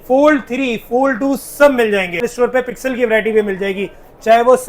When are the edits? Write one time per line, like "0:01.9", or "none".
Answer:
0:02.3